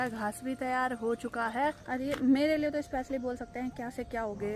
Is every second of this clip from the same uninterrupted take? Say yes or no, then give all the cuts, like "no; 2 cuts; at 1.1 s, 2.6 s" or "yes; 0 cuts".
no; 1 cut; at 1.8 s